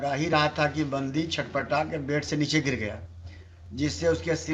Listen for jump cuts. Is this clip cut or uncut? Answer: uncut